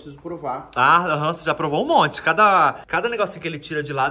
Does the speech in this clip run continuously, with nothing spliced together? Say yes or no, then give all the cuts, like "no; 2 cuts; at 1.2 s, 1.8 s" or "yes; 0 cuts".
no; 1 cut; at 2.8 s